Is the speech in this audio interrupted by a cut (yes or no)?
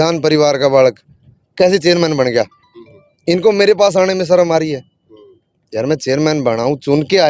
no